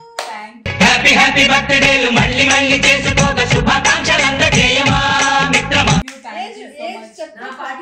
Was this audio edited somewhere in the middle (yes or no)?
no